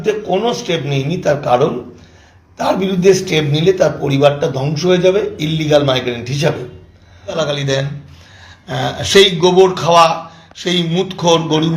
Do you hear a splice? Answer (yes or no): yes